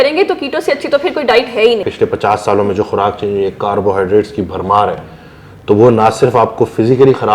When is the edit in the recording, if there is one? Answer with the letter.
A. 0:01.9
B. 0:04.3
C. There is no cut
A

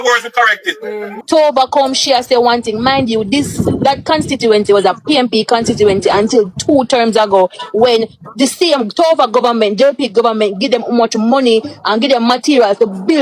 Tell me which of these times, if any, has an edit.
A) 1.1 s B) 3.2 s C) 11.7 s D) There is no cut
A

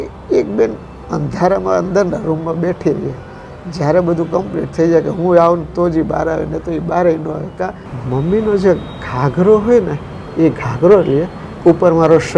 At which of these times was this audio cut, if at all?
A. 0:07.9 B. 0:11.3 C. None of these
A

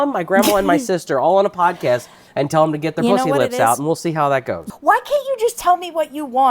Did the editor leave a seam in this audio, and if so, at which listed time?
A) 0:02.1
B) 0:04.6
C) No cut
B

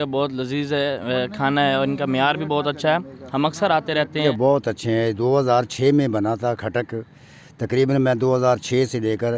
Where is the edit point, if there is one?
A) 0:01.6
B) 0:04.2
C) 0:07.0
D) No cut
B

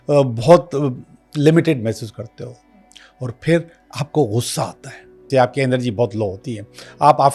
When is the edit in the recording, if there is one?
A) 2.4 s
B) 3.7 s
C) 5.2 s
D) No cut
C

